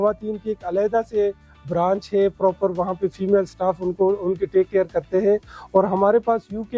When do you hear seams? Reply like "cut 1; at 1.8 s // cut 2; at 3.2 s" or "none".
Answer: none